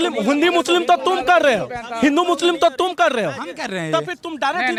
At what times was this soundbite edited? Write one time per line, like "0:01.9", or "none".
none